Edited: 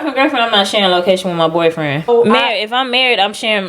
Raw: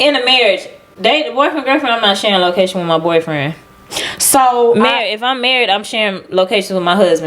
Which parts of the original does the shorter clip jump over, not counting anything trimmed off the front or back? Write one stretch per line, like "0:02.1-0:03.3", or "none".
0:03.6-0:04.6